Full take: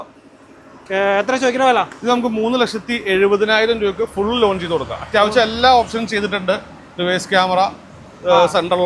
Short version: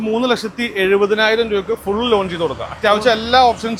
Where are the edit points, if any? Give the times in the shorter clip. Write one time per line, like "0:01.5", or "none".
none